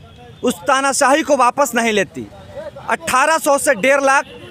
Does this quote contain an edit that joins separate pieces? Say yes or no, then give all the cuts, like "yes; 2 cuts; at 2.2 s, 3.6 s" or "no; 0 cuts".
no; 0 cuts